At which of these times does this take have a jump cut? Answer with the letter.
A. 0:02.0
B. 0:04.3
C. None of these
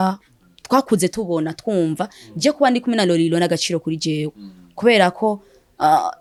C